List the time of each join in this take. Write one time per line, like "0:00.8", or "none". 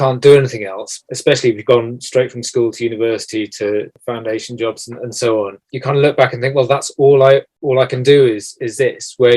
0:01.0
0:03.9
0:05.6
0:07.5